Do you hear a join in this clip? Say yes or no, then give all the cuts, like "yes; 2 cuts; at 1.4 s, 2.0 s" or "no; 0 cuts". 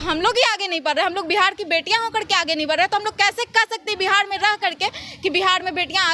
no; 0 cuts